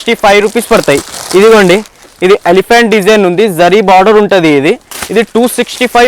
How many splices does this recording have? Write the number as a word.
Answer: one